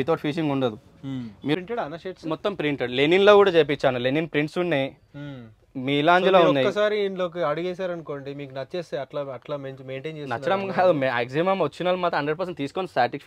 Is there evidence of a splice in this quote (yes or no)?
yes